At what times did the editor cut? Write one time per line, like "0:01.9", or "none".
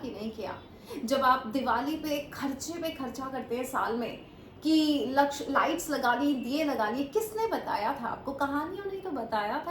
none